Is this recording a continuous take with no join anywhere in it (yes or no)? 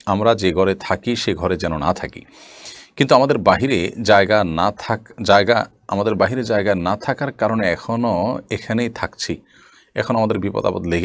yes